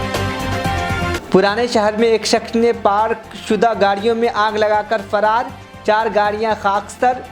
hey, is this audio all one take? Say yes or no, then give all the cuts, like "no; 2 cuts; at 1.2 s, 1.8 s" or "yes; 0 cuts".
no; 1 cut; at 1.1 s